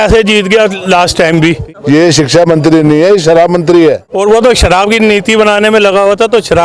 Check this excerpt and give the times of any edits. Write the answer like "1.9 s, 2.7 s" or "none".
1.7 s, 3.8 s